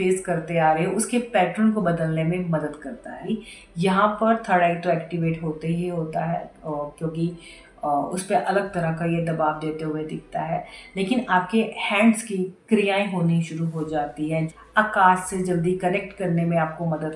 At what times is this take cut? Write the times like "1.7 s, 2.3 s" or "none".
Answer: 3.1 s, 14.5 s